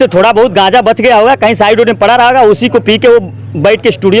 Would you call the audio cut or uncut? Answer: uncut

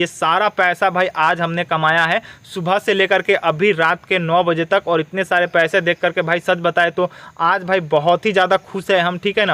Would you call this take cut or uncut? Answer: uncut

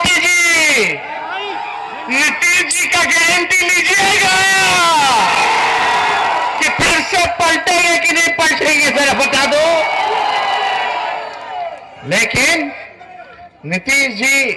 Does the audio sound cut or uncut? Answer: uncut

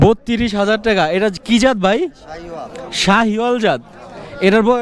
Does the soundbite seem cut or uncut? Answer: uncut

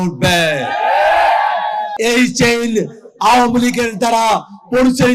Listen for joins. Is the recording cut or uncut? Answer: cut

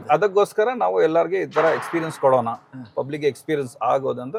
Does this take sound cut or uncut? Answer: uncut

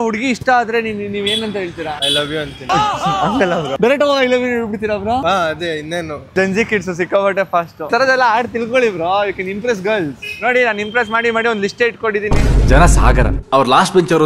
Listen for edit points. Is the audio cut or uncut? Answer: cut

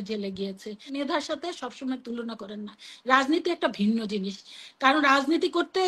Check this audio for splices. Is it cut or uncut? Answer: cut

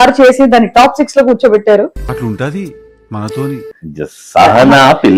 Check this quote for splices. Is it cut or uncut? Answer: uncut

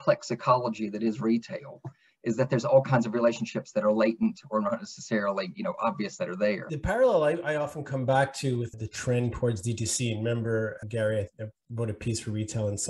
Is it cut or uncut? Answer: cut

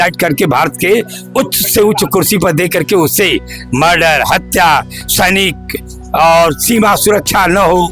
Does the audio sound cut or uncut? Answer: uncut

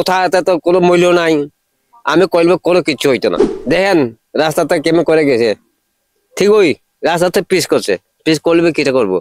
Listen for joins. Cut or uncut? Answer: cut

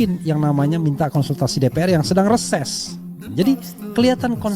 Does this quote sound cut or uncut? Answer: cut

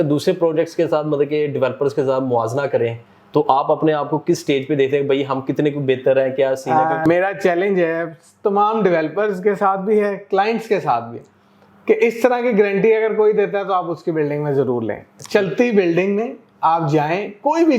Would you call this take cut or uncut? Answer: cut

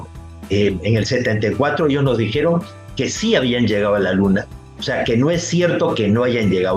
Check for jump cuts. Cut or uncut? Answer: uncut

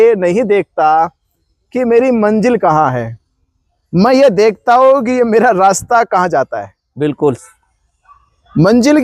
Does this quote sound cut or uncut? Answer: uncut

